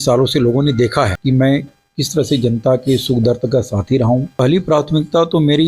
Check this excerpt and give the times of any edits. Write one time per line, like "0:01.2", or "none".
0:01.2
0:04.3

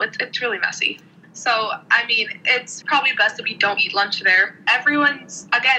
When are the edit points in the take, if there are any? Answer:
0:01.1
0:02.7
0:04.6

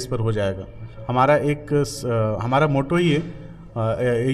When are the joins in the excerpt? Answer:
none

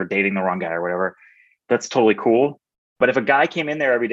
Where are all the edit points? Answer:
0:01.5
0:03.0

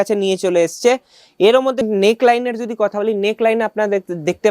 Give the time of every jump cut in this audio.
0:01.9

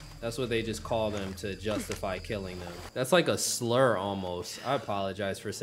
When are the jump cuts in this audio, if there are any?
0:02.8

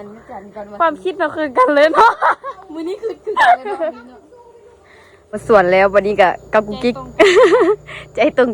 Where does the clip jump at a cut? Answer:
0:05.4

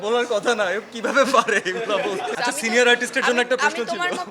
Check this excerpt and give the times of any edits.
0:02.3

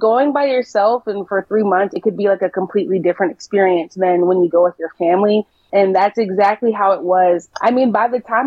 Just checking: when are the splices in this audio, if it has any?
0:05.6
0:07.5

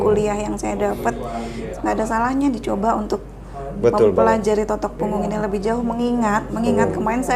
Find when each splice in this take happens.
0:01.6

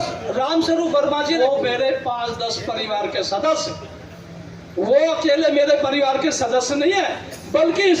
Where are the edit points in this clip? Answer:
0:01.4

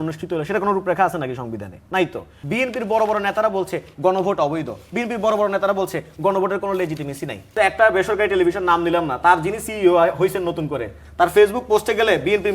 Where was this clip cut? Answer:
0:02.4
0:07.5

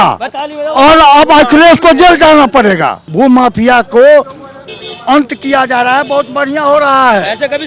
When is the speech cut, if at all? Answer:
0:03.0

